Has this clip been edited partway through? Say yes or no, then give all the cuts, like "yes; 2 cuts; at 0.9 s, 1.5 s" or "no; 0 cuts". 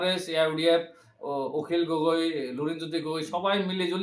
no; 0 cuts